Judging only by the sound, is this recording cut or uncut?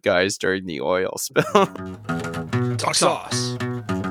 cut